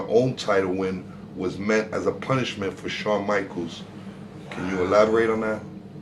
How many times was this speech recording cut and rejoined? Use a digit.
0